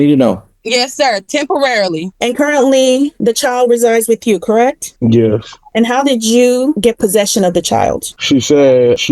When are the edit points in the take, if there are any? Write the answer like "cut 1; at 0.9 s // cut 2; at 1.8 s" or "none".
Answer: cut 1; at 2.1 s